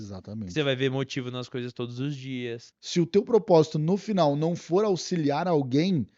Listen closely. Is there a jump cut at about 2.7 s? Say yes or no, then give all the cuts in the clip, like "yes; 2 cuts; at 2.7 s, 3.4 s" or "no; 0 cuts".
yes; 1 cut; at 2.7 s